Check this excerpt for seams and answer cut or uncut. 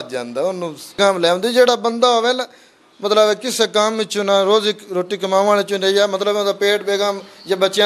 cut